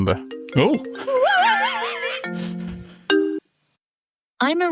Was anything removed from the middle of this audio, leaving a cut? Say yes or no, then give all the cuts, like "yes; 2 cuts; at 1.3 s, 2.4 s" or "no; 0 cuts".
no; 0 cuts